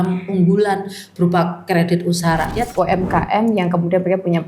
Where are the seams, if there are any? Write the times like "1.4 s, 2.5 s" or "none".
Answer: 2.7 s